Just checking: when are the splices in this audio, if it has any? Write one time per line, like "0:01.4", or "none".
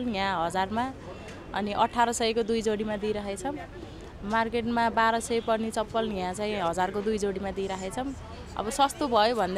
none